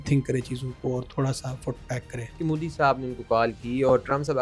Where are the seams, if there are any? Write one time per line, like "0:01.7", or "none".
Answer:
0:02.2